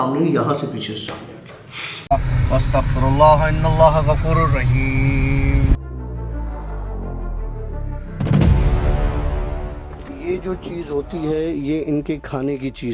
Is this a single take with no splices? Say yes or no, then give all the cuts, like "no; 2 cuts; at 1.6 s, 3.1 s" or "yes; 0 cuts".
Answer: no; 1 cut; at 2.0 s